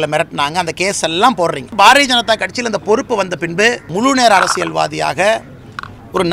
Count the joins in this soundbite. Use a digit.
2